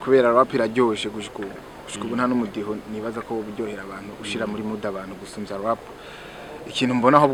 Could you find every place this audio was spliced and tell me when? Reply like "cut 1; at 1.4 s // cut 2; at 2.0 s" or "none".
none